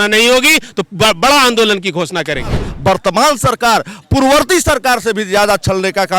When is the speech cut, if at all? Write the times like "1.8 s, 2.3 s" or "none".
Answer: 2.7 s